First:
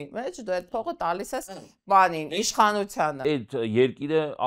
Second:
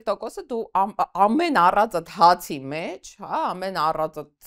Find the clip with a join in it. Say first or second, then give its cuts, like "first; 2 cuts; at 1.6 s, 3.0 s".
first; 1 cut; at 3.2 s